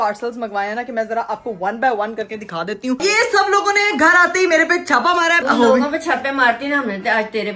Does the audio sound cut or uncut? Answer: cut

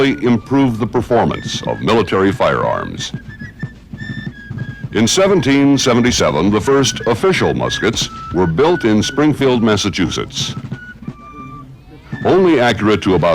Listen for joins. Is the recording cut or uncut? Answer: cut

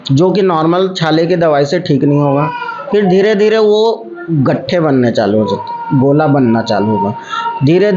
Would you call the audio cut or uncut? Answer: uncut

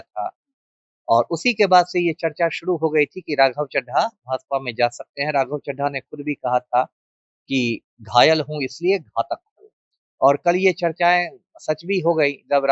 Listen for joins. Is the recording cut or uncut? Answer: uncut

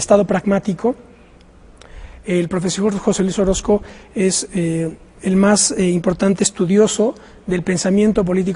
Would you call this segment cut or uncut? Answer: uncut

